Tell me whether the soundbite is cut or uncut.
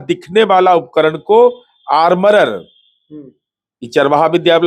uncut